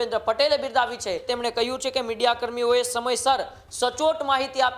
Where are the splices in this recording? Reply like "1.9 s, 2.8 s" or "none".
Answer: 1.3 s